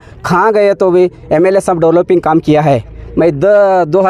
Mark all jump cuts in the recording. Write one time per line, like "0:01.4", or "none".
none